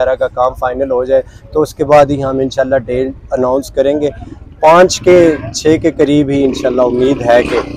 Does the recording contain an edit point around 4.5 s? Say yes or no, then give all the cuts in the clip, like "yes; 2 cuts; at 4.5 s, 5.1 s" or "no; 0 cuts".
no; 0 cuts